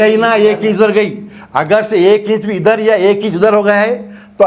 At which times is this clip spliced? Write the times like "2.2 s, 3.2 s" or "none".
none